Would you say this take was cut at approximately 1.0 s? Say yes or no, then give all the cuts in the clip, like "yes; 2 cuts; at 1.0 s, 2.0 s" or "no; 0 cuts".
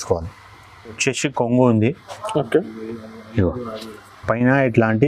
yes; 1 cut; at 1.0 s